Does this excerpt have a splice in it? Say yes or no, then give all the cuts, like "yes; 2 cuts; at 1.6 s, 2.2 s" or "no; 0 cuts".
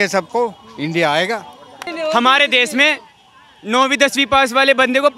yes; 1 cut; at 1.9 s